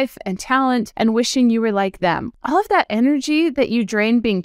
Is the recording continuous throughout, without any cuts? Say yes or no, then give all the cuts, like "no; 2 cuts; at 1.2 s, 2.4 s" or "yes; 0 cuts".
no; 2 cuts; at 0.9 s, 2.3 s